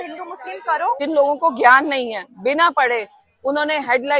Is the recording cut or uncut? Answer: cut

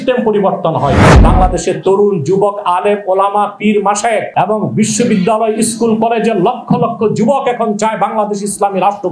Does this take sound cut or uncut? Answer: cut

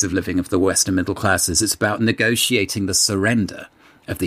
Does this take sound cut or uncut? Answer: uncut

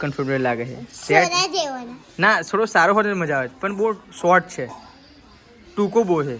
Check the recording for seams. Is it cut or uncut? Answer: uncut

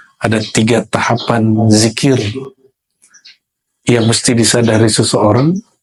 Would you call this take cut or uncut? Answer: uncut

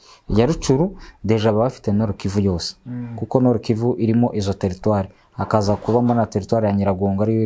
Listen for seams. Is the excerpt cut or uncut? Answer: uncut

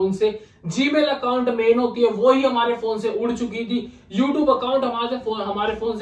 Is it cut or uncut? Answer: uncut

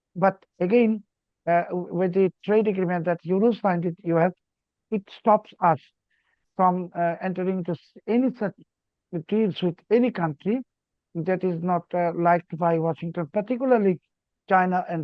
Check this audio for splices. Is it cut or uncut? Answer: uncut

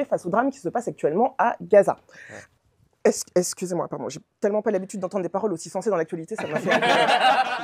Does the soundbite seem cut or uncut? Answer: uncut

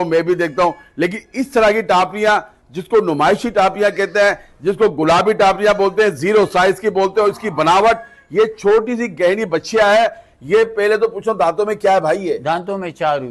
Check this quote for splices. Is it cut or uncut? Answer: uncut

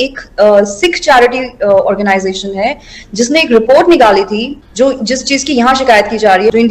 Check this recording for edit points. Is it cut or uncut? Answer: cut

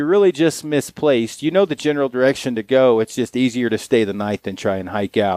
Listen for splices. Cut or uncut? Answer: uncut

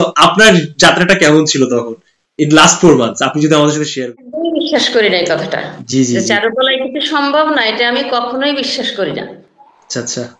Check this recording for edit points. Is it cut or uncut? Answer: cut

